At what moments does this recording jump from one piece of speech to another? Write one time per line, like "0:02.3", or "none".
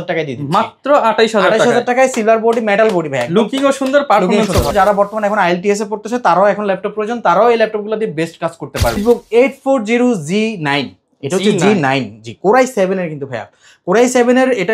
0:04.7
0:09.0